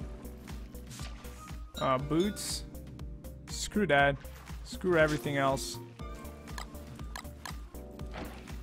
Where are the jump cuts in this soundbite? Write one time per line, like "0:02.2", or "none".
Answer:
0:05.2